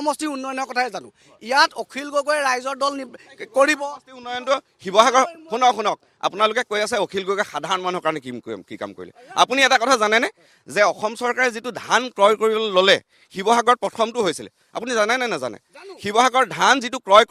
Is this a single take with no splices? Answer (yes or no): yes